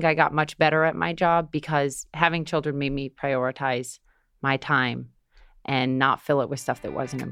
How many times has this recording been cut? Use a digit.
0